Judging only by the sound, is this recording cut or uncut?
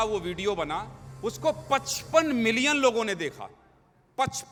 uncut